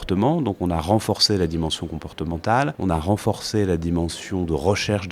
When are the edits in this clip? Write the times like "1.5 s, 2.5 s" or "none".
2.8 s